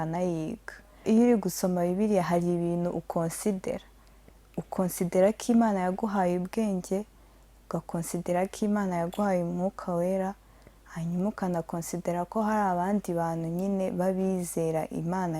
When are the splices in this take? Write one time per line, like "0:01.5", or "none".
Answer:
0:01.0